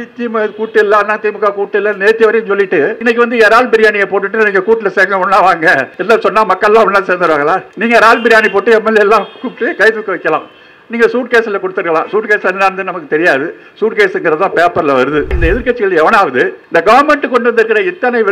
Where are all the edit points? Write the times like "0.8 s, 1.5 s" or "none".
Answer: 3.0 s, 5.9 s, 7.7 s, 15.4 s, 16.6 s